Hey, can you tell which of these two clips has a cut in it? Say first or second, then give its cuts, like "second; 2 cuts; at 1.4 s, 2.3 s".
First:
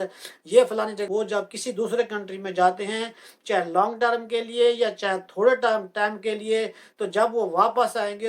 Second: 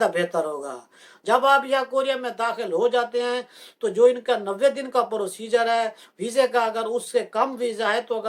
first; 1 cut; at 1.1 s